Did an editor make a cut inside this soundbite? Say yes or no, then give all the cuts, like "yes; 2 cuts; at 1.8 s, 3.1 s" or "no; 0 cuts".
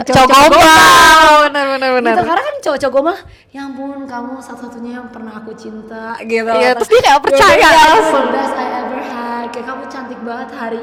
no; 0 cuts